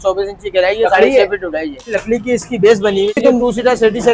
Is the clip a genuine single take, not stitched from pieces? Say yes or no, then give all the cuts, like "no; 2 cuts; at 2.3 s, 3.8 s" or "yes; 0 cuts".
no; 2 cuts; at 2.0 s, 3.2 s